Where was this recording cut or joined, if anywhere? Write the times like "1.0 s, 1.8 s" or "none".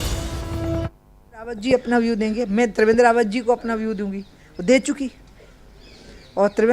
1.5 s